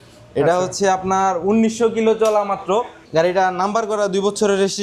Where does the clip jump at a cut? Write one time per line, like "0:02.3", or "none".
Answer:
0:03.0